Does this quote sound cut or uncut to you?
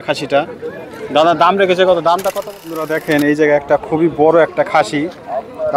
cut